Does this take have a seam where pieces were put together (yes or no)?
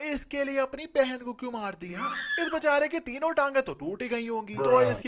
no